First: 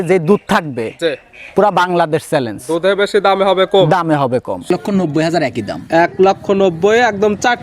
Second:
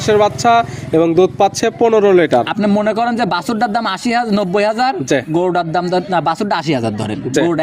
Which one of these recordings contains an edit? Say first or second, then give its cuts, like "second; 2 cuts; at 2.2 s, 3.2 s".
first; 1 cut; at 4.6 s